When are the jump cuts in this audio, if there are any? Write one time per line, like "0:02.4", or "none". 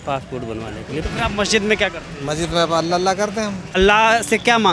0:01.0
0:03.7

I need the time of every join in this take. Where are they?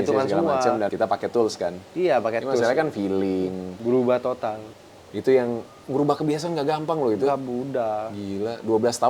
0:00.9
0:03.7
0:04.7

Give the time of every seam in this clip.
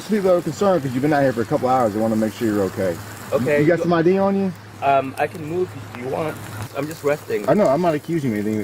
0:04.7
0:06.7

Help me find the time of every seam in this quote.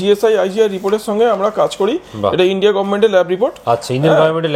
none

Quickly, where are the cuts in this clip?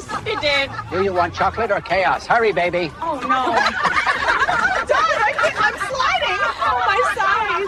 none

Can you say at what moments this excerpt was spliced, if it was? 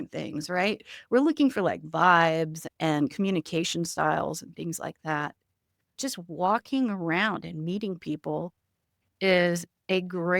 0:02.6
0:05.9

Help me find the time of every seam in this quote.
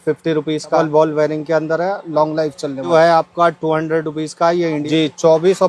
0:00.8
0:02.9
0:04.8

